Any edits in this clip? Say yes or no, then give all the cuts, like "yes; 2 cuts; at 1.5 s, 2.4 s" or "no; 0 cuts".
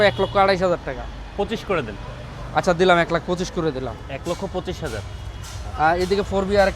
no; 0 cuts